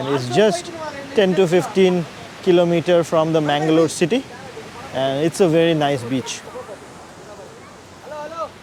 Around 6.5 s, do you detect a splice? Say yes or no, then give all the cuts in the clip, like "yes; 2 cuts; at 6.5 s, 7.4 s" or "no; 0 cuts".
no; 0 cuts